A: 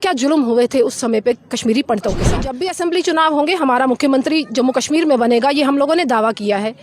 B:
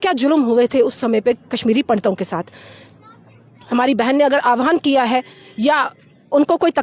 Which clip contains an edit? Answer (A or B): A